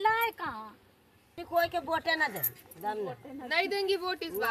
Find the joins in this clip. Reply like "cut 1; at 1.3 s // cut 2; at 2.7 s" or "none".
cut 1; at 1.4 s

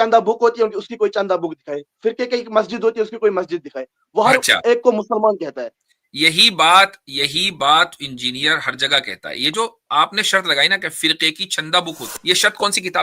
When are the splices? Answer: cut 1; at 12.1 s

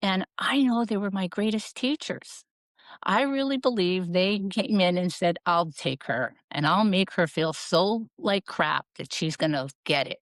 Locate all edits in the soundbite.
none

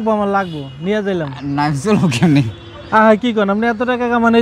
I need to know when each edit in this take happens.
none

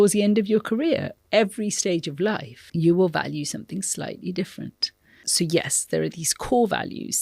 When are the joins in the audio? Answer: cut 1; at 1.1 s // cut 2; at 2.5 s // cut 3; at 5.3 s

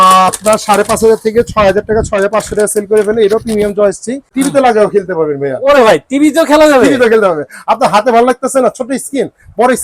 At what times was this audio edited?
cut 1; at 4.3 s

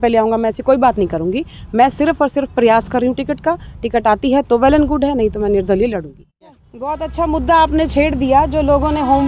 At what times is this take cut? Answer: cut 1; at 6.7 s

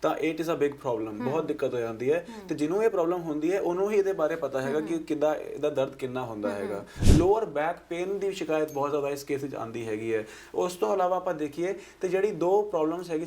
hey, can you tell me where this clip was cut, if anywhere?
cut 1; at 7.0 s

